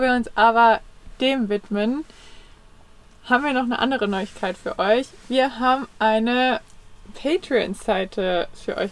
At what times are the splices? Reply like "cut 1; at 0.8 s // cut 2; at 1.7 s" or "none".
none